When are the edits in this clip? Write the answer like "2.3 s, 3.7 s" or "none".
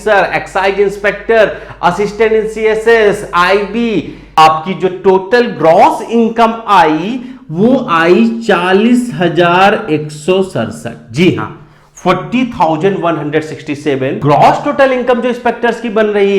4.3 s, 14.2 s